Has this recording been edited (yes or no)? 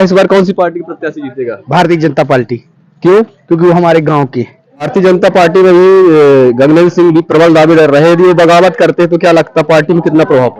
yes